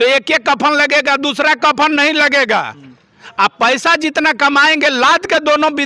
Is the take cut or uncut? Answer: uncut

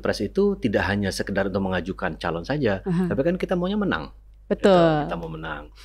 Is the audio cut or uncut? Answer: uncut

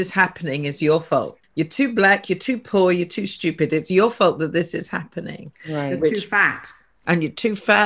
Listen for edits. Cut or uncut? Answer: cut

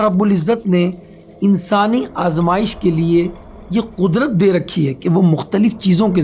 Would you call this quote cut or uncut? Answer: uncut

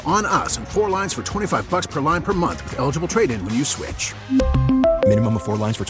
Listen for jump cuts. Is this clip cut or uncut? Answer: uncut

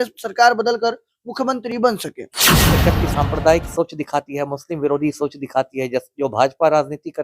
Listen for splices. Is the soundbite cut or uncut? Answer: cut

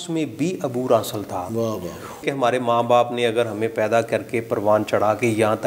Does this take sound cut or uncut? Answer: cut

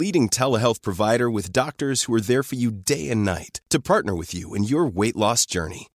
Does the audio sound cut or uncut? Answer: uncut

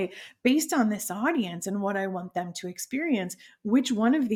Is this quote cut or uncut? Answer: uncut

